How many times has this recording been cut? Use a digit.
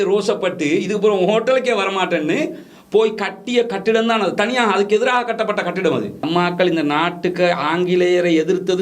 1